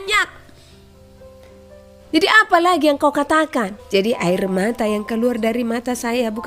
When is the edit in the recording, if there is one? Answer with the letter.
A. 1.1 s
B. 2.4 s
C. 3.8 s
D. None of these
C